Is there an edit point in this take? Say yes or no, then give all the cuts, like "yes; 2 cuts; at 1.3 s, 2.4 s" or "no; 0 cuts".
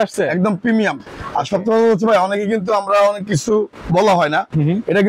no; 0 cuts